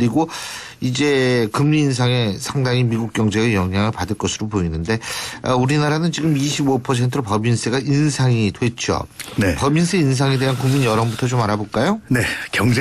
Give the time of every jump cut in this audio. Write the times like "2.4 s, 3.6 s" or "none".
5.2 s